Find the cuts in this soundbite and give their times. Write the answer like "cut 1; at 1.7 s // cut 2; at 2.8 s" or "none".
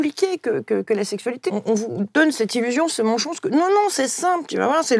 cut 1; at 1.4 s

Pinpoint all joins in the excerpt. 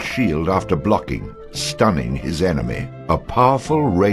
cut 1; at 2.9 s

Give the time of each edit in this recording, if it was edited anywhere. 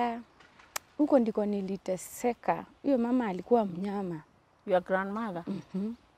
none

